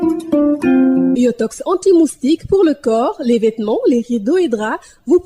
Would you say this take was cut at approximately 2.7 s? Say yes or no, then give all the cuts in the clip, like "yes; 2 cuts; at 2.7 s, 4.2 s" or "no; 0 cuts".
no; 1 cut; at 1.0 s